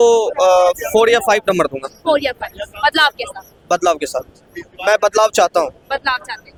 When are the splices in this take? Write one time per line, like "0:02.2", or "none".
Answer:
none